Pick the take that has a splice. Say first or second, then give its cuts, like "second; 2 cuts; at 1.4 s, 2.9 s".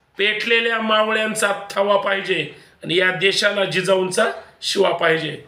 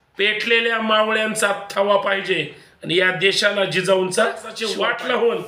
second; 1 cut; at 4.6 s